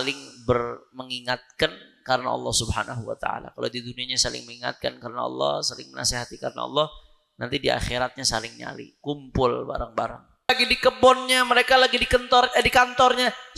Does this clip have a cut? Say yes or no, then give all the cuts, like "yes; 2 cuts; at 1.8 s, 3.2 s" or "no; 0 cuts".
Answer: yes; 1 cut; at 10.5 s